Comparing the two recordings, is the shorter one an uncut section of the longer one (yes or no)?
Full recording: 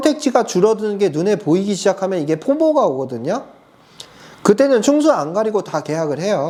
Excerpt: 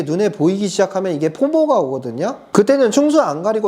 no